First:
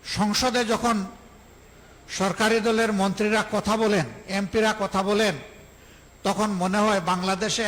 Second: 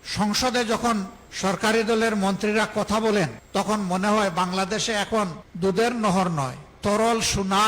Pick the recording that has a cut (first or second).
second